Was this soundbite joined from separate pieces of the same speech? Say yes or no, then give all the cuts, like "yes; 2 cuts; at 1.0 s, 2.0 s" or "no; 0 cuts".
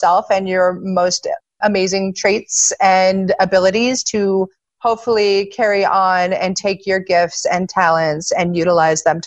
no; 0 cuts